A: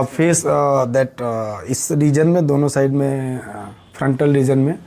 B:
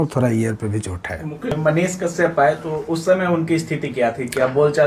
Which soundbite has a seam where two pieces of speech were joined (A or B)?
B